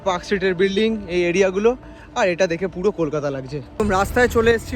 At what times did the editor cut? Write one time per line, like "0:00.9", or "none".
0:03.8